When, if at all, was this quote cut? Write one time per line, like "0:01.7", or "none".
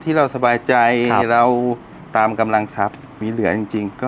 0:03.2